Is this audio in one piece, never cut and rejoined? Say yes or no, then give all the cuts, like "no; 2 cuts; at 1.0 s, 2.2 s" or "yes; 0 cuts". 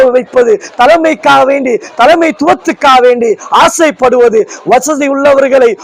yes; 0 cuts